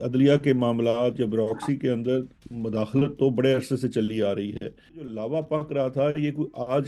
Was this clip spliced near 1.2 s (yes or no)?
no